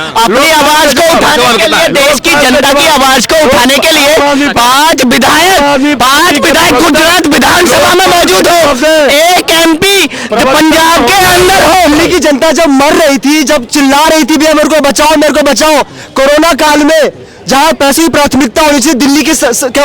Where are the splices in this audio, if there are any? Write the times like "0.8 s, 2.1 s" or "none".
11.9 s